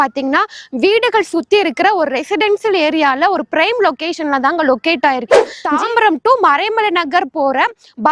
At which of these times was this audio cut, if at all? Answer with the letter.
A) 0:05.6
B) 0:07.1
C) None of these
A